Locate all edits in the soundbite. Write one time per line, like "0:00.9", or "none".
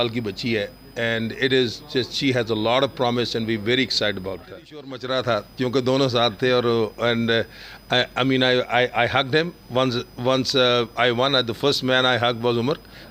0:05.0